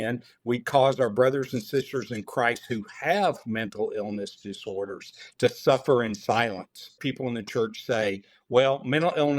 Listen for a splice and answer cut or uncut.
cut